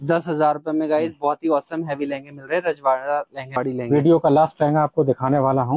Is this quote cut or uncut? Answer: uncut